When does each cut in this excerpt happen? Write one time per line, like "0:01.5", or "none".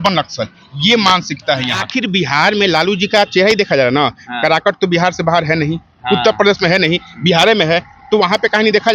0:01.9